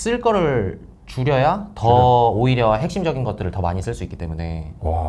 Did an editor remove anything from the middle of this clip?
no; 0 cuts

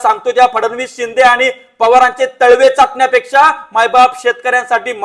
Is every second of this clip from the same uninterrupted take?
yes; 0 cuts

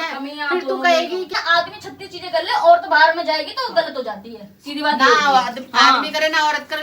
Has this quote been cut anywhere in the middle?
yes; 1 cut; at 1.4 s

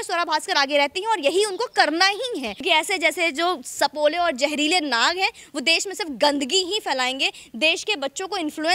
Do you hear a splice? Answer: yes; 1 cut; at 2.6 s

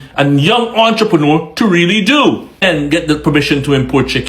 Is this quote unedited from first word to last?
no; 1 cut; at 2.6 s

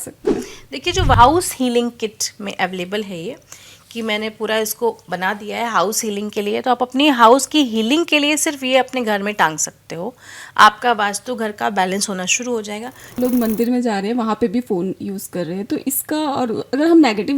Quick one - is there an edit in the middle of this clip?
yes; 2 cuts; at 1.2 s, 13.2 s

